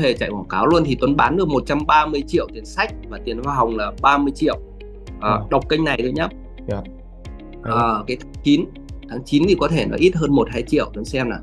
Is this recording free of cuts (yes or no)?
yes